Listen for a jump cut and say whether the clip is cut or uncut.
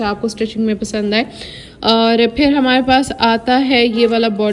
uncut